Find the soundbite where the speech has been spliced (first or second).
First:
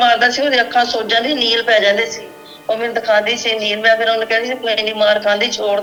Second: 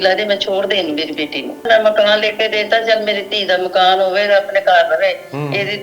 second